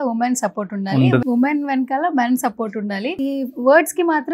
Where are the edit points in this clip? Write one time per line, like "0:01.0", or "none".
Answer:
0:01.2
0:03.1